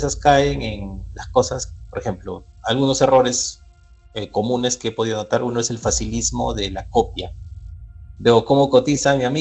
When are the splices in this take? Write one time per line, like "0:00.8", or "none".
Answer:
none